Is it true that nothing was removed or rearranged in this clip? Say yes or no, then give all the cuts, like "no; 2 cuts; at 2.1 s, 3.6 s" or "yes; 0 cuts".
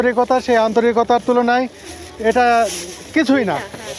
yes; 0 cuts